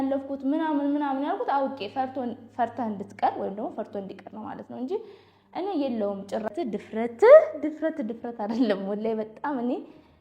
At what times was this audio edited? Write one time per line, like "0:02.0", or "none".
0:06.5